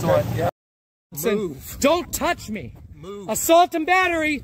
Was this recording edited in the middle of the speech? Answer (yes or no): yes